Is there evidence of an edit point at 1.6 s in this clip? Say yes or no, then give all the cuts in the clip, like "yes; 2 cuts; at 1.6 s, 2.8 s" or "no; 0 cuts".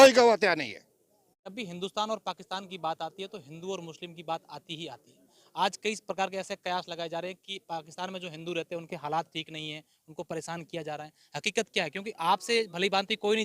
yes; 1 cut; at 1.6 s